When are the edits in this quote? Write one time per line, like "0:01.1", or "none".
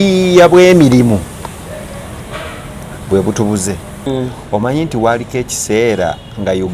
0:04.1